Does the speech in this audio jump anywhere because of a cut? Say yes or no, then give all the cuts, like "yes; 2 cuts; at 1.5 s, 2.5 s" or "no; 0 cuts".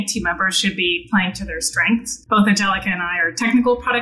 yes; 1 cut; at 2.1 s